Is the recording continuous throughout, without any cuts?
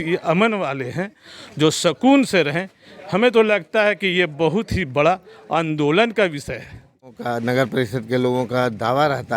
no; 1 cut; at 7.2 s

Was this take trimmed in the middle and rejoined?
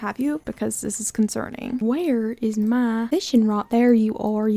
yes; 1 cut; at 1.8 s

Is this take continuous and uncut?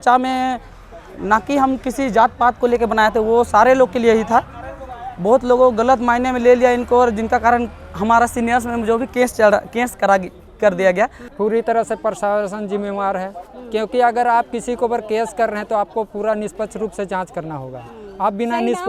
no; 1 cut; at 11.2 s

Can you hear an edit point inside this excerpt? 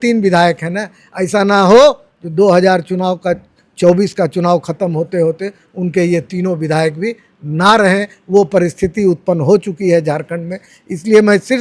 no; 0 cuts

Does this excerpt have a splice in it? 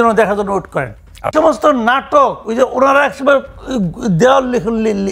yes; 1 cut; at 1.3 s

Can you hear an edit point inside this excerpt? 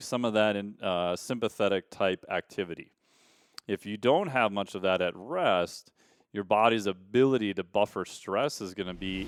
no; 0 cuts

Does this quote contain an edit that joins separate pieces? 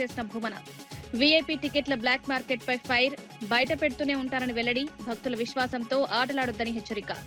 no; 0 cuts

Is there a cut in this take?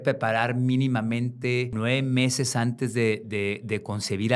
yes; 1 cut; at 1.7 s

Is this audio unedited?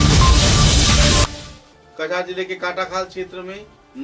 yes; 0 cuts

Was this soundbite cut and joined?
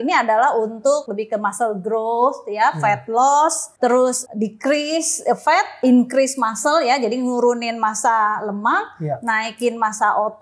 yes; 3 cuts; at 1.1 s, 3.9 s, 5.8 s

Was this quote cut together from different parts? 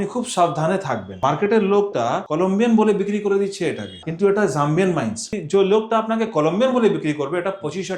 yes; 4 cuts; at 1.1 s, 2.2 s, 4.0 s, 5.3 s

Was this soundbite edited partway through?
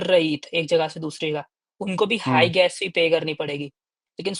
no; 0 cuts

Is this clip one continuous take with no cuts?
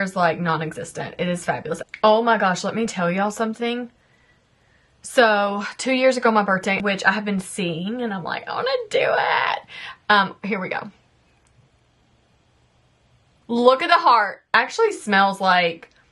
no; 3 cuts; at 1.8 s, 6.8 s, 14.5 s

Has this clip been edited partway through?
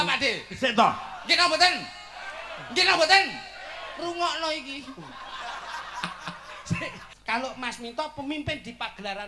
yes; 1 cut; at 7.1 s

